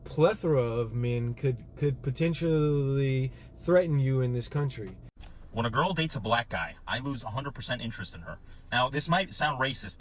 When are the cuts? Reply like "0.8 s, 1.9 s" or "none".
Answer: 5.1 s